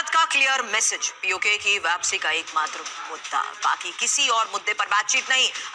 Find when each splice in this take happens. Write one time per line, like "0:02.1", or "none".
none